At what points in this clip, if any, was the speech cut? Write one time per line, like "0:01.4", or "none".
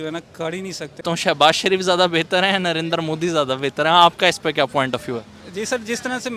0:01.0